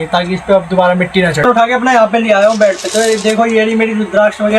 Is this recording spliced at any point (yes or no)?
yes